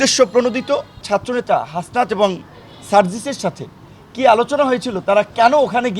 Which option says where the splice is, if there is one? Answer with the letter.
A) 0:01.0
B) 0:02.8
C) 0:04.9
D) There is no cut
A